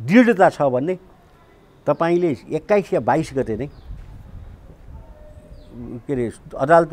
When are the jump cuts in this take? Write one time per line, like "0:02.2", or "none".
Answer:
none